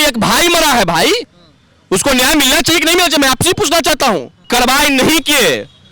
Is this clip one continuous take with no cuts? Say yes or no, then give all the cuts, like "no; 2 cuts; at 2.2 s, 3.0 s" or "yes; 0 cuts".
no; 1 cut; at 4.3 s